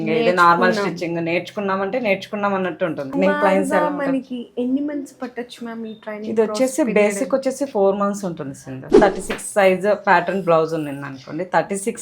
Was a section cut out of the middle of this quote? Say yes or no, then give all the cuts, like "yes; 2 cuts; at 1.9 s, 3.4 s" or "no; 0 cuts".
yes; 2 cuts; at 3.1 s, 9.0 s